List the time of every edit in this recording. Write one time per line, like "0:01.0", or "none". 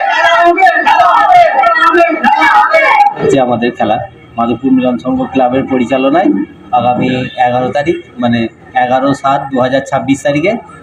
0:03.2